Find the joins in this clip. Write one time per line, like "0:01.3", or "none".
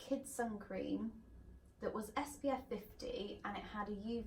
none